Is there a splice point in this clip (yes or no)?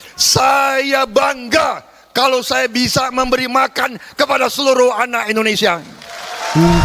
no